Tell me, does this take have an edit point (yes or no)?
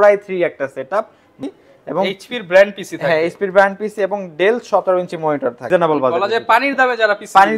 yes